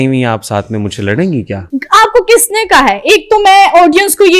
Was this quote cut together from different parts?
yes; 1 cut; at 1.6 s

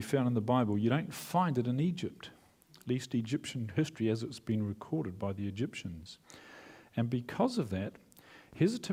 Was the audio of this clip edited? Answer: no; 0 cuts

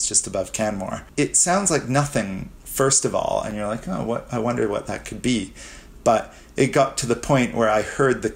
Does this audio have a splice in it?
yes; 1 cut; at 1.0 s

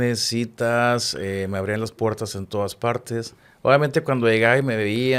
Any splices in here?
no; 0 cuts

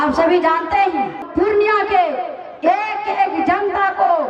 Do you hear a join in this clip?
yes; 1 cut; at 1.2 s

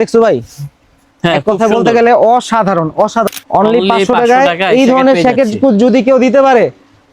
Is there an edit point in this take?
yes; 1 cut; at 3.3 s

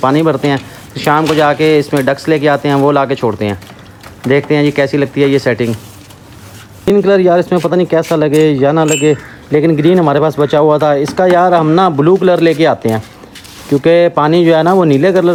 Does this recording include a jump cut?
no; 0 cuts

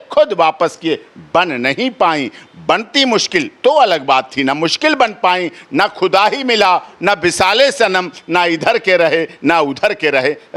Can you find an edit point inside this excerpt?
no; 0 cuts

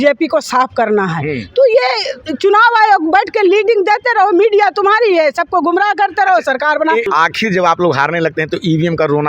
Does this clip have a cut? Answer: yes; 1 cut; at 7.1 s

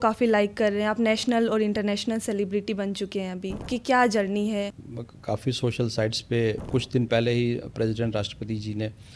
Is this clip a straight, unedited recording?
no; 3 cuts; at 3.7 s, 4.8 s, 6.6 s

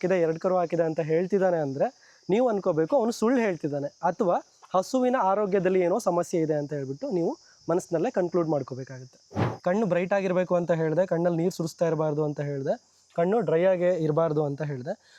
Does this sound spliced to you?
no; 0 cuts

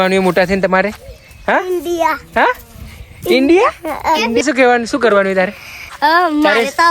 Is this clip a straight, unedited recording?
no; 1 cut; at 4.4 s

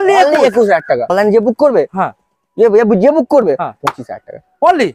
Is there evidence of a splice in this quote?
yes; 1 cut; at 1.1 s

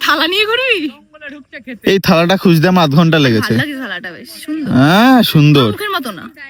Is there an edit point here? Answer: no; 0 cuts

